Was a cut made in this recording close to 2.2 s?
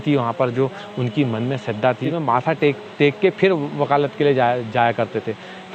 yes; 1 cut; at 2.2 s

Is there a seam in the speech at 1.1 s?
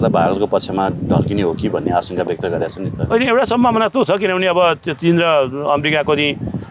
no; 0 cuts

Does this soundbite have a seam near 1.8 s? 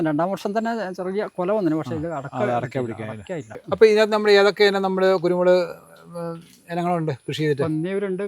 no; 1 cut; at 3.7 s

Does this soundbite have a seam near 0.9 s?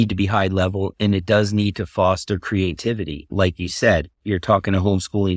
yes; 3 cuts; at 0.9 s, 3.3 s, 4.1 s

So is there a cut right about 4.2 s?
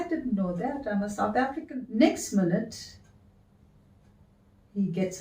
no; 1 cut; at 1.6 s

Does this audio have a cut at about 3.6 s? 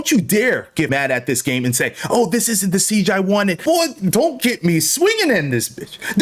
yes; 2 cuts; at 0.9 s, 3.6 s

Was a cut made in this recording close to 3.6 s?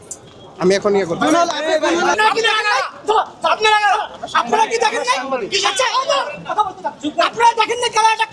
no; 1 cut; at 2.1 s

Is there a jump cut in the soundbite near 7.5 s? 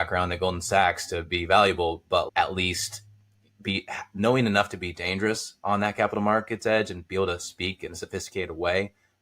no; 1 cut; at 2.3 s

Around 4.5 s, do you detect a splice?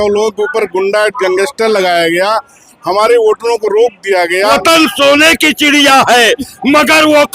yes; 1 cut; at 4.5 s

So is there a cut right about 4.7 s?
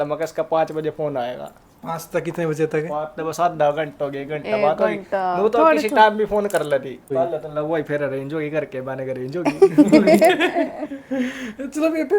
no; 1 cut; at 7.1 s

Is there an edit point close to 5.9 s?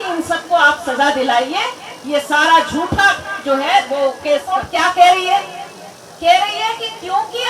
no; 1 cut; at 4.5 s

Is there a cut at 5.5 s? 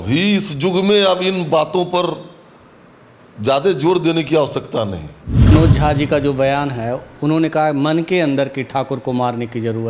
yes; 1 cut; at 5.5 s

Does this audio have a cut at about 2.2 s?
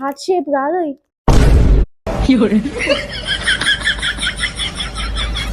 no; 1 cut; at 1.0 s

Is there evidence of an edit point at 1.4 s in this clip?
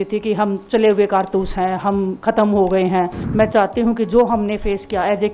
no; 1 cut; at 3.2 s

